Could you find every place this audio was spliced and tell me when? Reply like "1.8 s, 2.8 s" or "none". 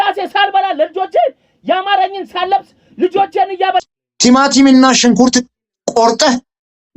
3.8 s